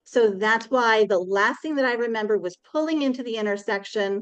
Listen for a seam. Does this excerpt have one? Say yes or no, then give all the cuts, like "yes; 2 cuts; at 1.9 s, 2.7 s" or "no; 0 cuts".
no; 0 cuts